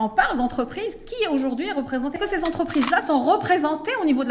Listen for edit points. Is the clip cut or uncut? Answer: cut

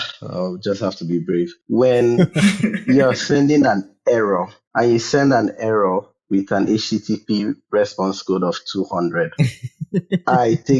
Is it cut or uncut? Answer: cut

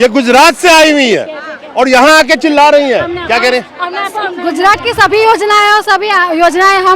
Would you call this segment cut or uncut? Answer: uncut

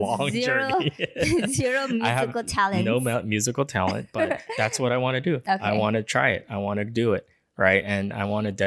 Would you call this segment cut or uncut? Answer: uncut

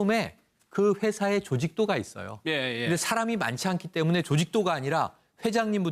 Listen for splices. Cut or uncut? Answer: cut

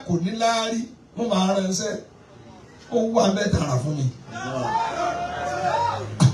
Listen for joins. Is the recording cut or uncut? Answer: uncut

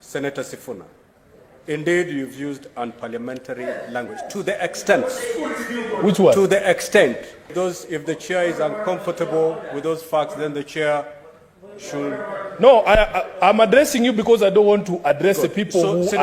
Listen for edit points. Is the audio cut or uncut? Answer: cut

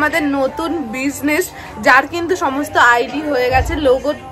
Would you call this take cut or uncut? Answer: uncut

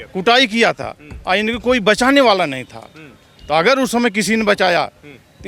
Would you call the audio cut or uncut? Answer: uncut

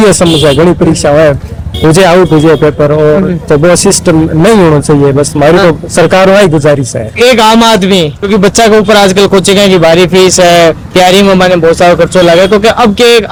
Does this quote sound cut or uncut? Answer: uncut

